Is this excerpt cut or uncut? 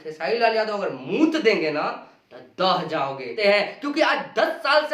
cut